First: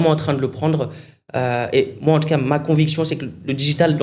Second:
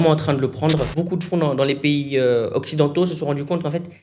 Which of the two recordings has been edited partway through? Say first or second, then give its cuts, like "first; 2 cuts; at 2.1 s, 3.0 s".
second; 1 cut; at 0.9 s